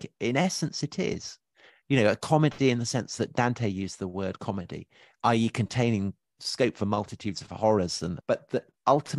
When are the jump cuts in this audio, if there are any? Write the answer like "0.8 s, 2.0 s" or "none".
6.4 s, 8.2 s